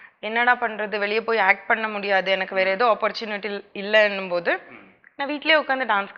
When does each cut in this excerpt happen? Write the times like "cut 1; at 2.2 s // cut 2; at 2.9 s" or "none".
none